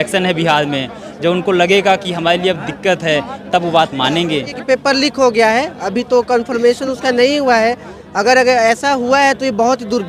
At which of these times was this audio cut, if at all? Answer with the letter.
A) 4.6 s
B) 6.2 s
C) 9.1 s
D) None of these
A